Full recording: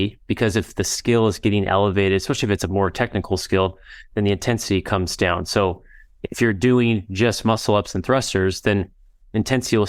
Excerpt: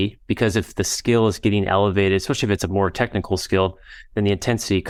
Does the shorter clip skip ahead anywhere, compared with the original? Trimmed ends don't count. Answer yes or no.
no